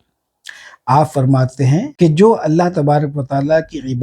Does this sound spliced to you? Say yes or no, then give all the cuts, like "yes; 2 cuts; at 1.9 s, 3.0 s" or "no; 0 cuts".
yes; 1 cut; at 1.9 s